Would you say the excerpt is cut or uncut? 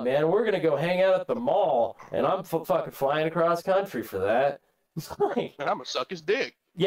uncut